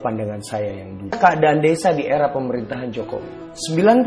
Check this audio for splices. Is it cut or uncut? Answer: cut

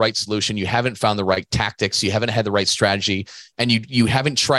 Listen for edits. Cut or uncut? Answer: uncut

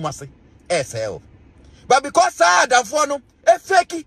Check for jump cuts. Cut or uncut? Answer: uncut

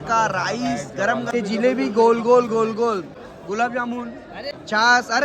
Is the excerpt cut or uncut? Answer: cut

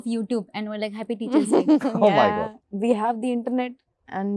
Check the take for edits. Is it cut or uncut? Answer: cut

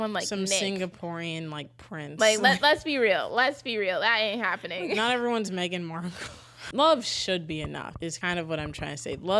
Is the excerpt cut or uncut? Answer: cut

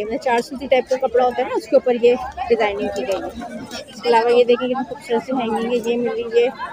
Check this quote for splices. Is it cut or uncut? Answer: uncut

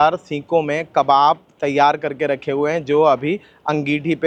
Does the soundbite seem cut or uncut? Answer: uncut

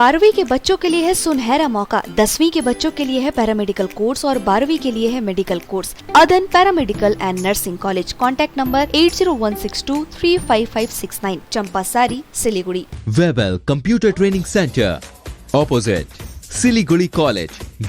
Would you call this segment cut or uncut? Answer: cut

